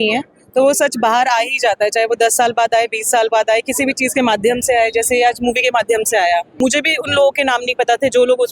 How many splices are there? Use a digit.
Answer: 1